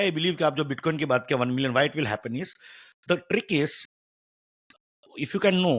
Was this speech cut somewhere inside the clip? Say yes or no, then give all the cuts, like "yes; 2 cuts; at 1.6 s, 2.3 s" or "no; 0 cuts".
no; 0 cuts